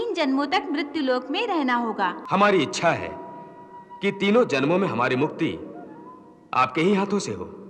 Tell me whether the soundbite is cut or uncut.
cut